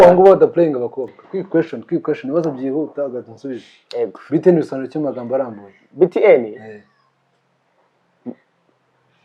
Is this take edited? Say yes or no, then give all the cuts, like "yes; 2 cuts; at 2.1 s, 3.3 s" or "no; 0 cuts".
yes; 1 cut; at 1.3 s